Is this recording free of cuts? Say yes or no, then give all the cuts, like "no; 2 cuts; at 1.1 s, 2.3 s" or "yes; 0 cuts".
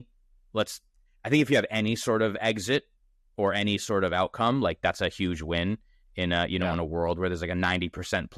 yes; 0 cuts